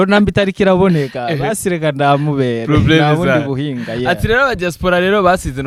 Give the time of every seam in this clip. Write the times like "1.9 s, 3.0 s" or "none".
none